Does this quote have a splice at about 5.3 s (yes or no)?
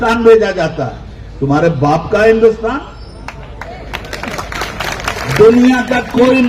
yes